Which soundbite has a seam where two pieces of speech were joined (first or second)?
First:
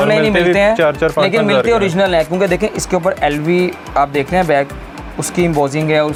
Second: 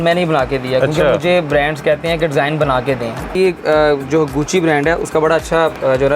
second